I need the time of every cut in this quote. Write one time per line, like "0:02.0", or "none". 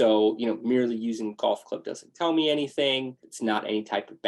0:03.2